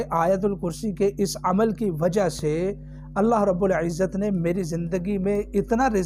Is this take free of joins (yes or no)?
yes